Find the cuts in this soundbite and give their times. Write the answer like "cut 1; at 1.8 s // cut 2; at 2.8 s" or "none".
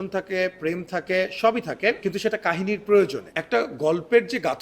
cut 1; at 2.0 s // cut 2; at 3.3 s